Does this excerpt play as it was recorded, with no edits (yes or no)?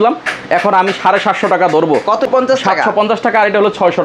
no